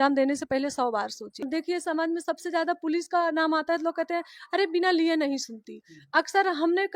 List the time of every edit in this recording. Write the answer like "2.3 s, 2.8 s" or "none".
1.5 s